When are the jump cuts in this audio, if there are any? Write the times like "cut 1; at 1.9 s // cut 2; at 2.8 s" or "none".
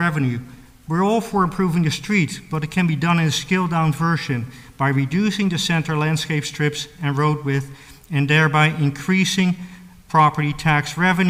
none